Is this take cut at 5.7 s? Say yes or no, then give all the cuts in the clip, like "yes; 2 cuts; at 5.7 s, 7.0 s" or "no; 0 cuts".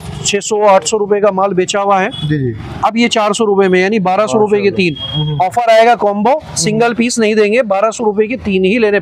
no; 0 cuts